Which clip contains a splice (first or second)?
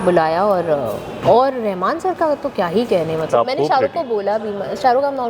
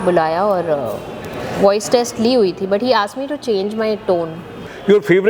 first